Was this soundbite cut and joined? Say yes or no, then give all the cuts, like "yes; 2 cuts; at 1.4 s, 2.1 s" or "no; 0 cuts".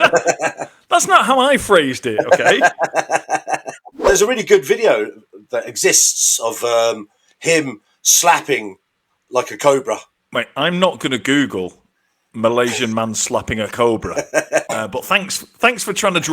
yes; 3 cuts; at 4.1 s, 10.2 s, 14.7 s